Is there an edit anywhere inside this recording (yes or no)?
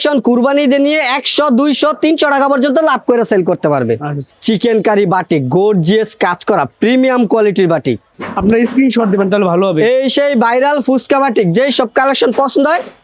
yes